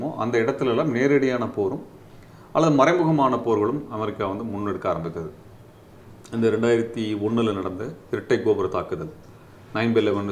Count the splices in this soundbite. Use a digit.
0